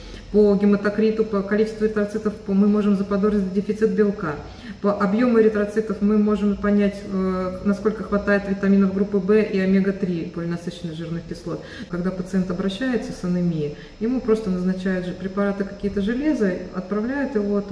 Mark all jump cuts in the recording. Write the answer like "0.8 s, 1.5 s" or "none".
11.8 s